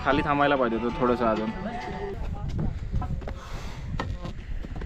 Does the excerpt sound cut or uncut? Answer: cut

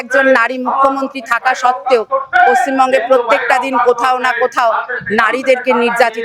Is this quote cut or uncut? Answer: uncut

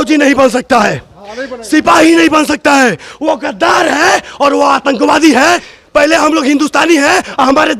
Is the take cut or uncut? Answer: cut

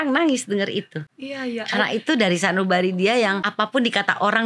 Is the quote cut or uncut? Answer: cut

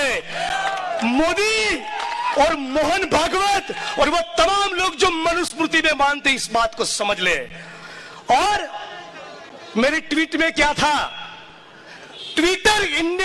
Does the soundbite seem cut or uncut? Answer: uncut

